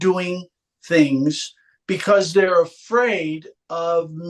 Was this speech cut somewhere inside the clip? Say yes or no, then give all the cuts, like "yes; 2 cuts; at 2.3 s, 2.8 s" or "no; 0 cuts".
no; 0 cuts